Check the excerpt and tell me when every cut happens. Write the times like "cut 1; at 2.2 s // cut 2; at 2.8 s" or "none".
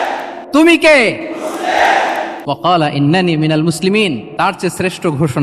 cut 1; at 2.3 s // cut 2; at 4.3 s